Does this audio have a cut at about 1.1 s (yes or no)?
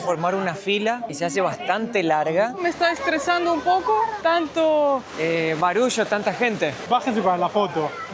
yes